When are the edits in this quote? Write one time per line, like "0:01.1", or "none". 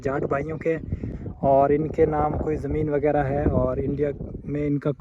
0:01.0